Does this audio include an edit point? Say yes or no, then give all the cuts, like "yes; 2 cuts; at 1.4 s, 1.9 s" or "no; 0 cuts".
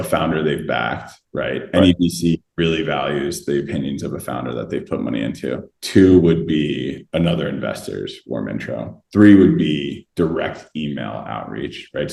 no; 0 cuts